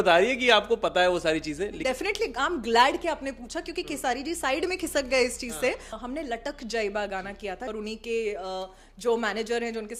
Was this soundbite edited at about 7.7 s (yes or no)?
yes